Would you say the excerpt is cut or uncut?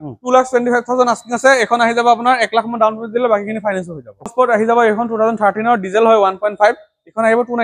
cut